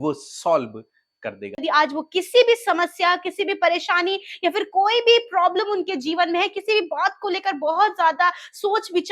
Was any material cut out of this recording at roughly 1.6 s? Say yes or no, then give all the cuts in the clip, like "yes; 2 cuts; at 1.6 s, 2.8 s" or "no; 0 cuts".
yes; 1 cut; at 1.6 s